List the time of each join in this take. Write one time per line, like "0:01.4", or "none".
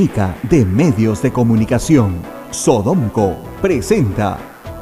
none

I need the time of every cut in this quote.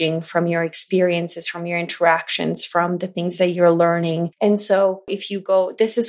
0:04.3
0:05.2

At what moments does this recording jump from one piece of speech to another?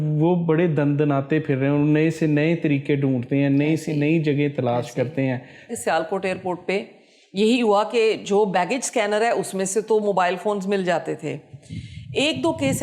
0:05.7

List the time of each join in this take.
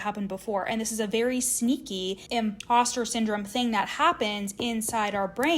0:02.4

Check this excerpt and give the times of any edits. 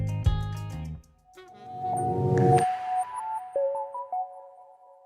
0:03.6

